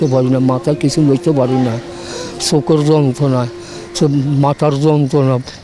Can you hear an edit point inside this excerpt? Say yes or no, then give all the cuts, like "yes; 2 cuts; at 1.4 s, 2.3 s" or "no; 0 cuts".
no; 0 cuts